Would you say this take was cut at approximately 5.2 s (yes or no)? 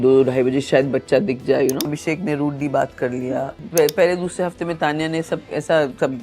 no